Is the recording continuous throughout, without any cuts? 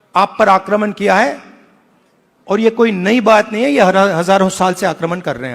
yes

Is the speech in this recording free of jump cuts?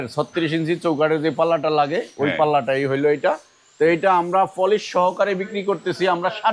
yes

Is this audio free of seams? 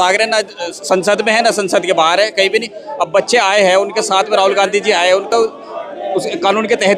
yes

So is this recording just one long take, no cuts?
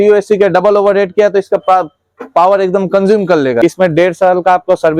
no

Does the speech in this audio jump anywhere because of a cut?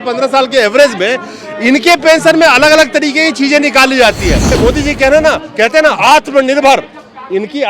yes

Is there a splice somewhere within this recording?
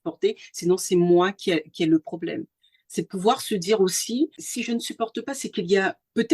yes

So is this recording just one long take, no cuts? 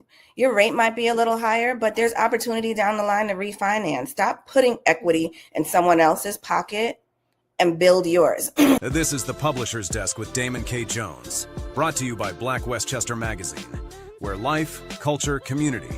no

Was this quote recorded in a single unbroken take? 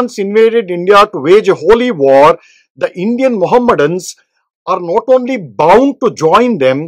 yes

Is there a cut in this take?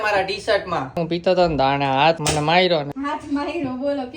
yes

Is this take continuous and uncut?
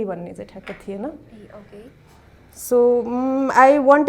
yes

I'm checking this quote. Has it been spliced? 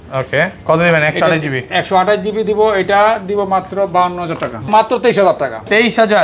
yes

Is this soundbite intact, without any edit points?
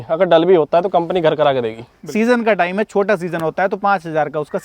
no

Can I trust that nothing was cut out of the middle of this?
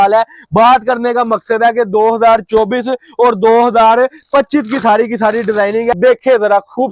no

